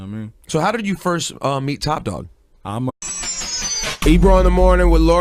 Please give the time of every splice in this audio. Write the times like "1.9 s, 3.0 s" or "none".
none